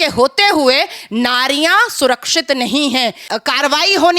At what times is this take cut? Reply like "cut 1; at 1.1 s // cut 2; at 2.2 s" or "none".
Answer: cut 1; at 3.2 s